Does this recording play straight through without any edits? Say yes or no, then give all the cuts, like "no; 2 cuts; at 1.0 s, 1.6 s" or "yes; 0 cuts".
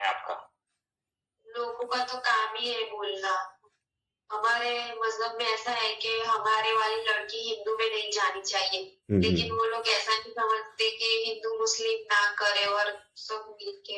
yes; 0 cuts